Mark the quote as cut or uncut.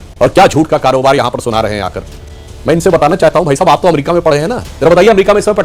uncut